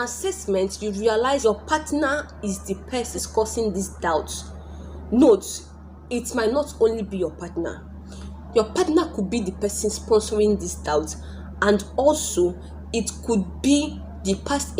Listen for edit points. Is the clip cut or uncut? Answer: cut